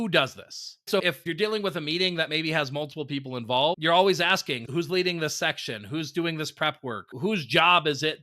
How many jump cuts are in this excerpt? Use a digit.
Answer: 1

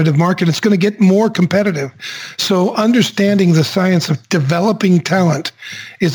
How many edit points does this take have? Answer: 1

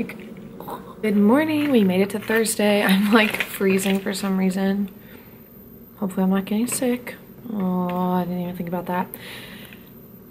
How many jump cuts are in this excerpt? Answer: 0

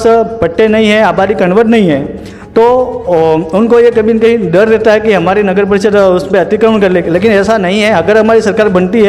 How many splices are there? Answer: 0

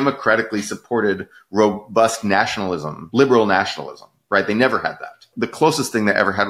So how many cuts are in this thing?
1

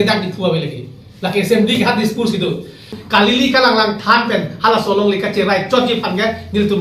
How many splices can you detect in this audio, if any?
1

